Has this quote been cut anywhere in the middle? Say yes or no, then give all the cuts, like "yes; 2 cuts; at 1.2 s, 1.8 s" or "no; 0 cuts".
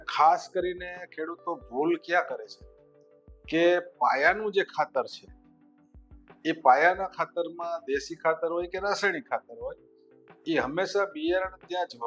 no; 0 cuts